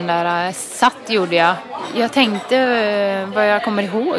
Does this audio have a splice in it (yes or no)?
yes